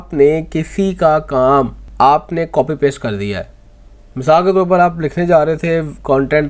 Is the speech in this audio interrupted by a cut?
no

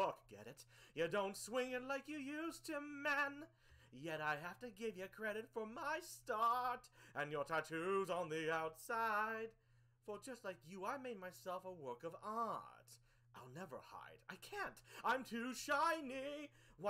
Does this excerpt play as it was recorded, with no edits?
yes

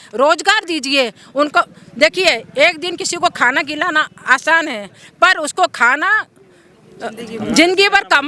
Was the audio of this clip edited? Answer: no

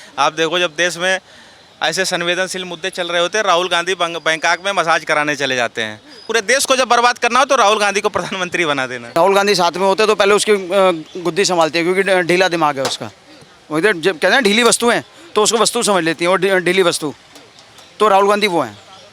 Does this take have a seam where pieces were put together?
yes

